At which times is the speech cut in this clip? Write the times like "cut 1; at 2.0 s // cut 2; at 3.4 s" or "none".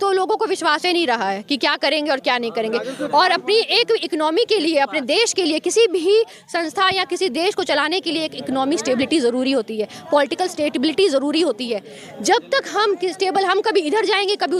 none